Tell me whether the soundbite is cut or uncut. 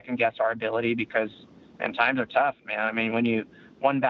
uncut